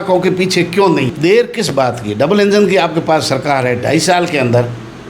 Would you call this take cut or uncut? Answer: cut